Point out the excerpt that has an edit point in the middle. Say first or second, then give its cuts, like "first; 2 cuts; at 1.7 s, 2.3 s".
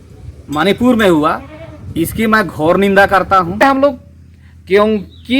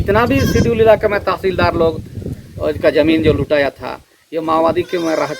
first; 1 cut; at 3.6 s